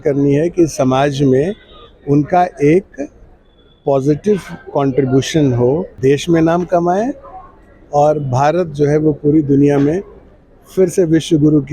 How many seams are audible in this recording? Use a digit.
1